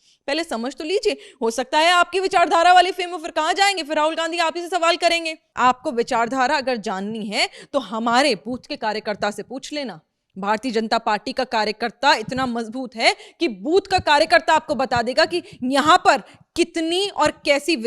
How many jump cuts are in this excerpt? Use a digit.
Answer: 1